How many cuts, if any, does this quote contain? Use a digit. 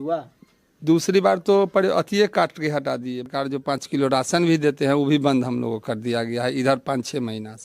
1